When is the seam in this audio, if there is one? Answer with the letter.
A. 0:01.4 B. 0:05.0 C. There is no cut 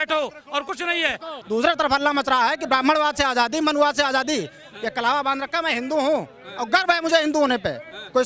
A